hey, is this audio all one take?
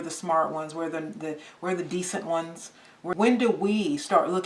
no; 1 cut; at 3.0 s

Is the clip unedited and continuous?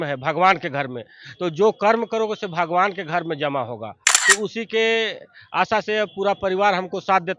yes; 0 cuts

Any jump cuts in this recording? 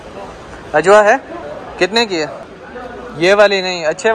no; 0 cuts

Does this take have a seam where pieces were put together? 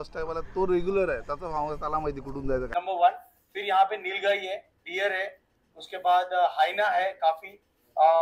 yes; 1 cut; at 2.7 s

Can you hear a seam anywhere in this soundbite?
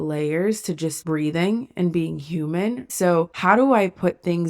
yes; 1 cut; at 3.4 s

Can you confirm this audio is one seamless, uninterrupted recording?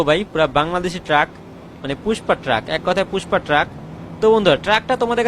yes; 0 cuts

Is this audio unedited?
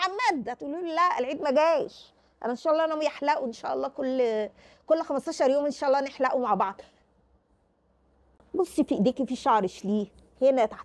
yes; 0 cuts

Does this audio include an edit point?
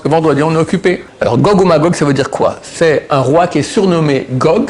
yes; 1 cut; at 1.1 s

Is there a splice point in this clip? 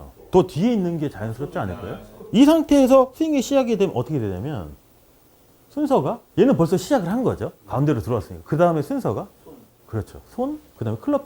no; 0 cuts

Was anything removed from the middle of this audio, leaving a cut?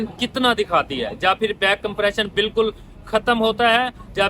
no; 0 cuts

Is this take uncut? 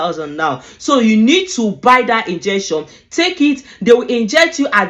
yes; 0 cuts

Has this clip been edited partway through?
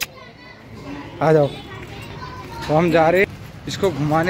no; 0 cuts

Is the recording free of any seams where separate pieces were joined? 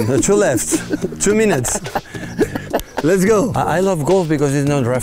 no; 1 cut; at 3.5 s

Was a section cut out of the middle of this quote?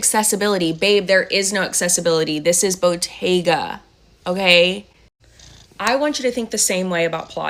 no; 0 cuts

